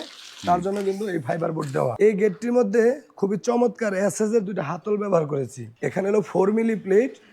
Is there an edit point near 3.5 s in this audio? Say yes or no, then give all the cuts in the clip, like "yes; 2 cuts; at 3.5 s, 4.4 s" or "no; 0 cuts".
no; 2 cuts; at 1.9 s, 5.6 s